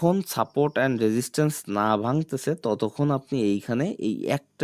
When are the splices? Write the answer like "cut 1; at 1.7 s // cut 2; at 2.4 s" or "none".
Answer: none